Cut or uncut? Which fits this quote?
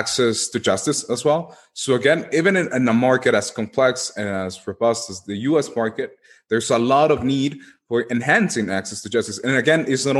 uncut